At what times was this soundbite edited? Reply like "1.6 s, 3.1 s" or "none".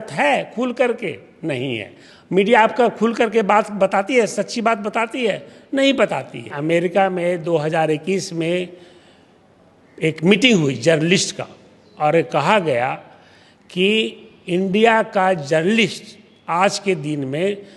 6.5 s

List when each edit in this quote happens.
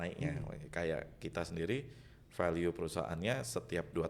none

